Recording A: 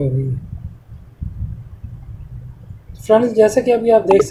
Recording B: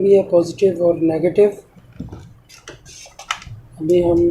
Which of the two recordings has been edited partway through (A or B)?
B